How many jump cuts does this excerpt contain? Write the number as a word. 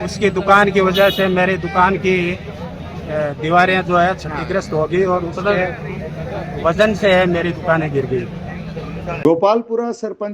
one